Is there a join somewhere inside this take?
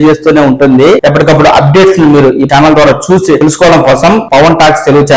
yes; 4 cuts; at 1.0 s, 2.5 s, 3.4 s, 4.2 s

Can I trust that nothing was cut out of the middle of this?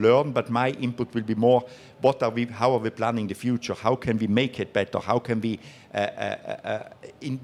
yes; 0 cuts

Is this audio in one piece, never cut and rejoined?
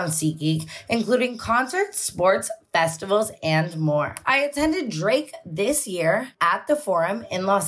yes; 0 cuts

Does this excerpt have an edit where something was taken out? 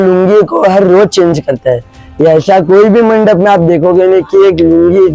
no; 0 cuts

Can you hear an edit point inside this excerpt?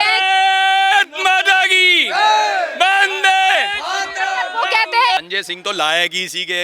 yes; 1 cut; at 5.3 s

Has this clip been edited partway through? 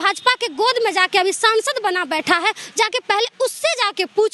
no; 0 cuts

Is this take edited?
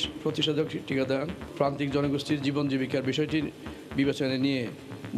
yes; 1 cut; at 1.4 s

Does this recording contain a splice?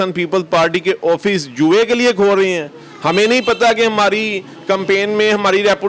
no; 0 cuts

